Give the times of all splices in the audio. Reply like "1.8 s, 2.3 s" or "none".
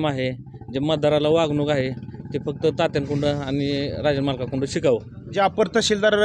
5.2 s